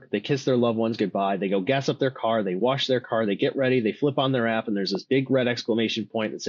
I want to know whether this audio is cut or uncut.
uncut